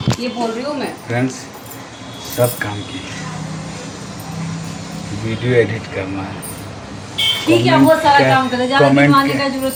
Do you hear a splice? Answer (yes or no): no